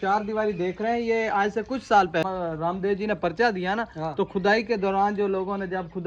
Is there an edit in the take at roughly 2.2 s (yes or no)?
yes